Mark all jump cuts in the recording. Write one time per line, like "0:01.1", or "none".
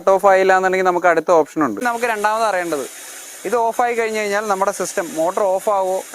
0:01.8